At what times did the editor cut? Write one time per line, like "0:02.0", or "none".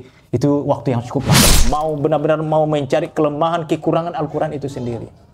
0:01.5